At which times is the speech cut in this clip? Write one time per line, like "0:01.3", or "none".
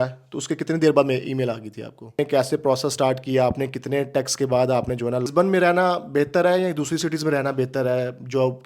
0:02.2
0:05.3